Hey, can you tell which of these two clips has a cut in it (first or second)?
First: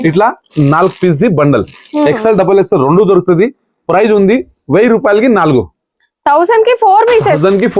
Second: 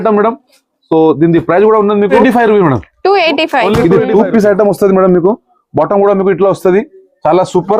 second